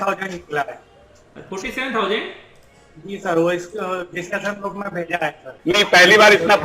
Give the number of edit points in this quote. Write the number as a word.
one